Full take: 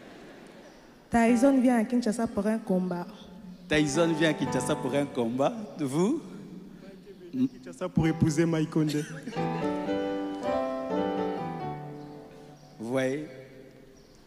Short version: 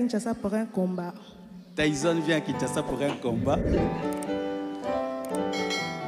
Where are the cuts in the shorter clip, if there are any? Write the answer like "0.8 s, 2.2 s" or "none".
3.7 s